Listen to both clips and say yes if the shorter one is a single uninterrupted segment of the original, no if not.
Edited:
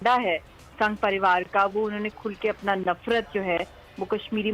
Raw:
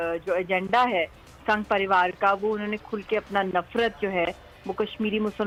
yes